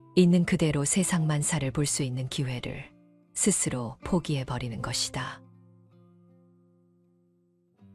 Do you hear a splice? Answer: no; 0 cuts

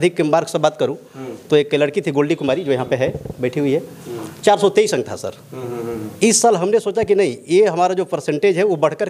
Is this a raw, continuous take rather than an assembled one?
yes; 0 cuts

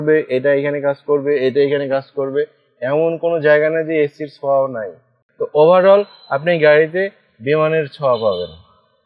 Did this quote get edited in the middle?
yes; 1 cut; at 5.2 s

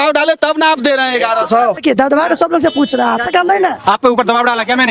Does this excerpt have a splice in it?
yes; 1 cut; at 1.8 s

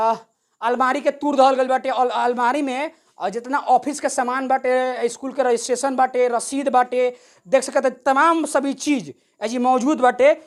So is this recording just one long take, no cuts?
yes; 0 cuts

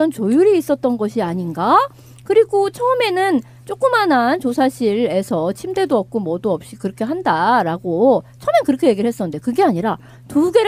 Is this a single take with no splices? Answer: no; 1 cut; at 3.9 s

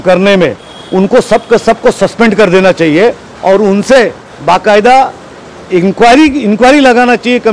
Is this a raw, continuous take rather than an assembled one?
yes; 0 cuts

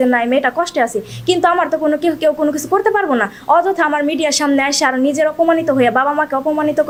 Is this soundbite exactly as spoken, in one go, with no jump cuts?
yes; 0 cuts

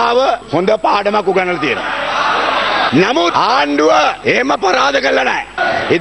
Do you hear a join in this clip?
no; 0 cuts

